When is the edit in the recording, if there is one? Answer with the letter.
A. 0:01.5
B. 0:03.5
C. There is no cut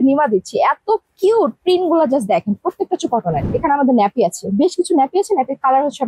B